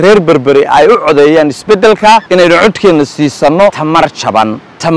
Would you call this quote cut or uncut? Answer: cut